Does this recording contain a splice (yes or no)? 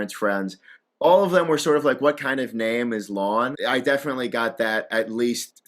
yes